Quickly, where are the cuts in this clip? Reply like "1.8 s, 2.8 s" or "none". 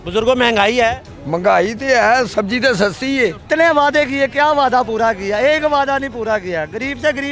1.1 s, 3.4 s